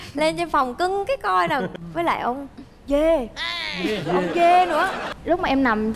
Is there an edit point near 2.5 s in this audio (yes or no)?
no